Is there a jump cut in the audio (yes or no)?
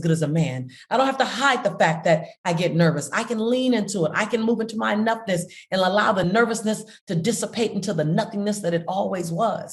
yes